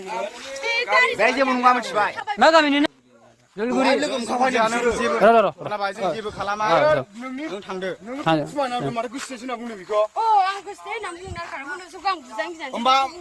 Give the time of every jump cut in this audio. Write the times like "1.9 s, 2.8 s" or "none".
2.9 s